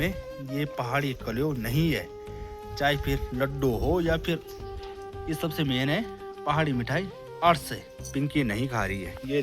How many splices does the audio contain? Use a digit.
1